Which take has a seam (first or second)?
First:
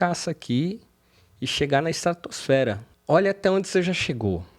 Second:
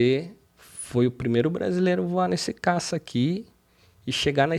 first